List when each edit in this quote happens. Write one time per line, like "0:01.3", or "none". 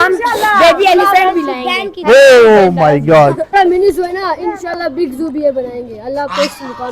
0:03.5